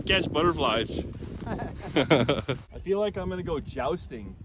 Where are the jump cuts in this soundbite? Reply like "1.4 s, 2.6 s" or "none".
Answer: 2.7 s